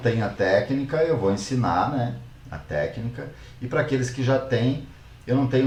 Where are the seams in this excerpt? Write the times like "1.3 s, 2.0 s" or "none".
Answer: none